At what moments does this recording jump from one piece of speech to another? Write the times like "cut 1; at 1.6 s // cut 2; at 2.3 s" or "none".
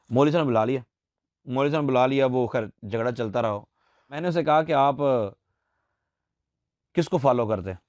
cut 1; at 4.2 s